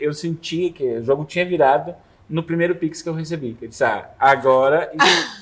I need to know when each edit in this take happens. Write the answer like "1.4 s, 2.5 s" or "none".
none